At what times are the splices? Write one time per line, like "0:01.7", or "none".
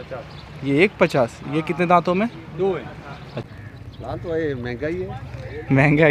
0:03.5